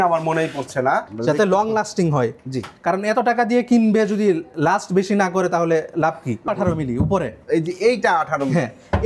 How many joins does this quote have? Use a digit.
2